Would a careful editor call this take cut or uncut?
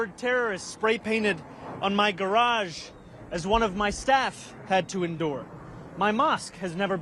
uncut